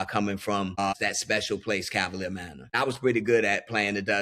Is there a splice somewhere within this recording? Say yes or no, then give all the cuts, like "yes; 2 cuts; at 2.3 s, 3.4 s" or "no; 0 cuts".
yes; 2 cuts; at 0.8 s, 2.7 s